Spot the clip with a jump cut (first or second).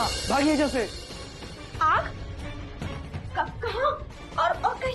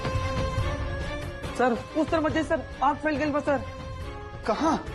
first